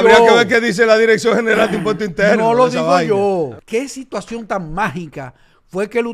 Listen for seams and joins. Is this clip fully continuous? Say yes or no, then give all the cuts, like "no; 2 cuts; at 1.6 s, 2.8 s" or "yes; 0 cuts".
no; 1 cut; at 3.6 s